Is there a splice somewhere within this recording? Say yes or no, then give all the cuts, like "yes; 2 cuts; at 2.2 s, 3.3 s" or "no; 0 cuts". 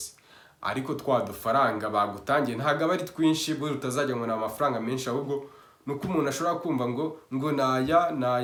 no; 0 cuts